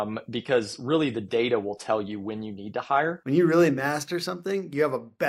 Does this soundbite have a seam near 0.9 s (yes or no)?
no